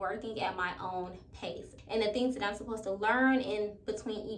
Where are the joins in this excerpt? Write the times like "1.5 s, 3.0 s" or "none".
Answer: 1.7 s